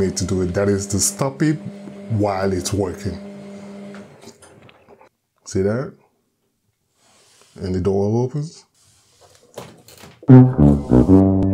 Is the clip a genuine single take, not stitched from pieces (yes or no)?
no